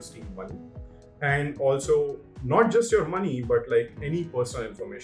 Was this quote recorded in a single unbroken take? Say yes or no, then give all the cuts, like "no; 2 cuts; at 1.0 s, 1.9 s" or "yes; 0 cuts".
yes; 0 cuts